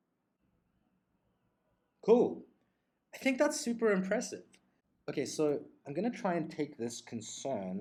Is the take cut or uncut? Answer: uncut